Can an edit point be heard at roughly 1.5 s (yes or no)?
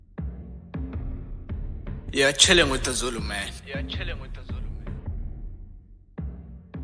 yes